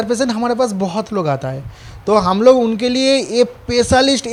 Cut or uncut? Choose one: uncut